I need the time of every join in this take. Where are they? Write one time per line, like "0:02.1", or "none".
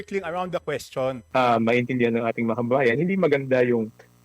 0:01.2